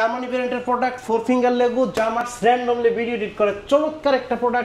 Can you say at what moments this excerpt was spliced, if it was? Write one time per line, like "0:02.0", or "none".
0:02.2